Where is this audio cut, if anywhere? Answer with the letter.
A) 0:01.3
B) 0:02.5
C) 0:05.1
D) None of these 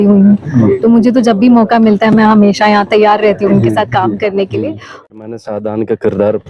C